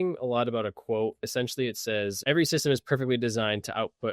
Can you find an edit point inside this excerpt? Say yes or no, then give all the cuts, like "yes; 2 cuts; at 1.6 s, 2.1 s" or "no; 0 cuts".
yes; 2 cuts; at 1.3 s, 2.2 s